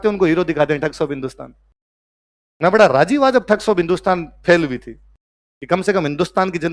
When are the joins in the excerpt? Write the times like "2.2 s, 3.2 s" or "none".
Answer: none

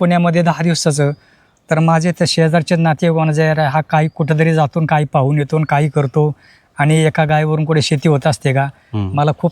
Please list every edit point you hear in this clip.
none

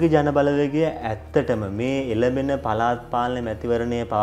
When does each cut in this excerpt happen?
none

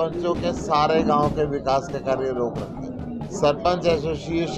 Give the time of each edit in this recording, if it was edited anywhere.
3.3 s

